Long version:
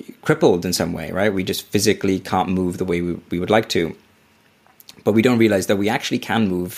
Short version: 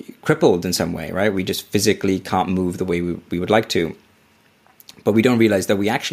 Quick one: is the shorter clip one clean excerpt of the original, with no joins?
yes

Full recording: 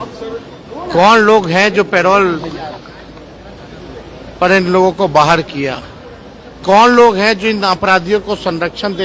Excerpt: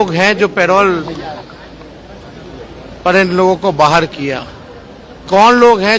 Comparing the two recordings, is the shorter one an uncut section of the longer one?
yes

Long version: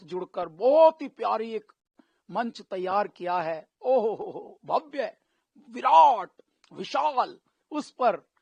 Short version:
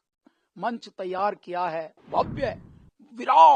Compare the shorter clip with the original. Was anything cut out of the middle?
yes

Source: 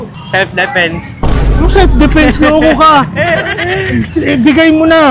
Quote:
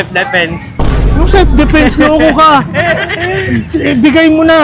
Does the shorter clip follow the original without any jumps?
yes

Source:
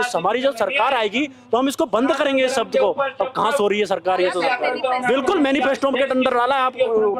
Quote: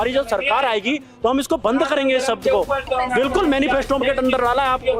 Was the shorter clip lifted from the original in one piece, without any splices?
no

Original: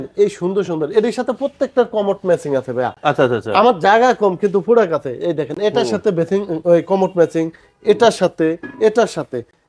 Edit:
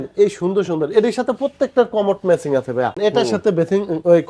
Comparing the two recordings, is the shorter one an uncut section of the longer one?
no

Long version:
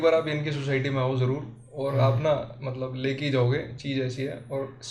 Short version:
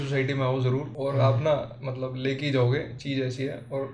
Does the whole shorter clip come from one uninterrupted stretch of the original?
no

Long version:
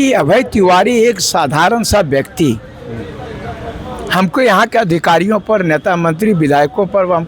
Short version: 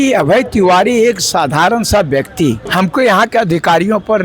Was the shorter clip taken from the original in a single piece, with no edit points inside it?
no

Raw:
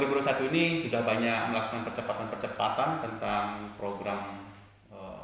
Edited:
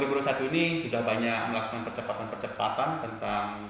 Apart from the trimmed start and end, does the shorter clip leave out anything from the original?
no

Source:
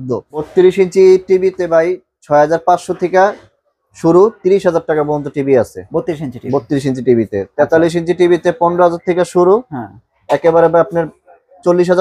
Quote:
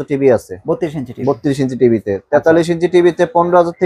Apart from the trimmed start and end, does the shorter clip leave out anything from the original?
no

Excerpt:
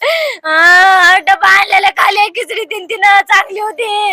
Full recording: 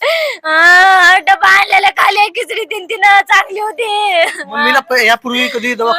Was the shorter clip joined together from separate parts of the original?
no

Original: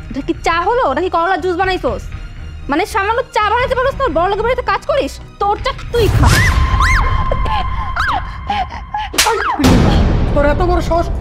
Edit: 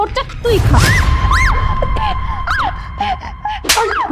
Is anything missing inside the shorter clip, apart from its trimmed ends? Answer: no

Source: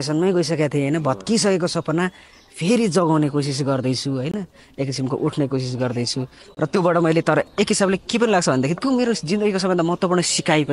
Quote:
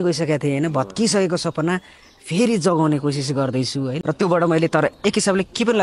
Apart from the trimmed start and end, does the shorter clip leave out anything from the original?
yes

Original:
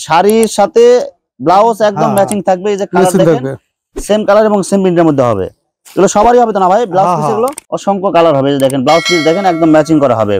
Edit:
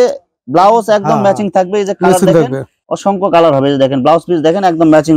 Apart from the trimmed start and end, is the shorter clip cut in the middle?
yes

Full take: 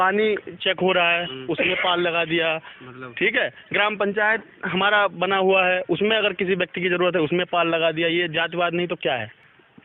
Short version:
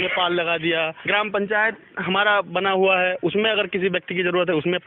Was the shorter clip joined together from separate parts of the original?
yes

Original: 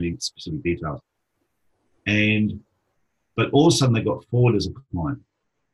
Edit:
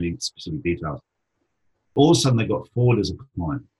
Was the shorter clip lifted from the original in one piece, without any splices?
no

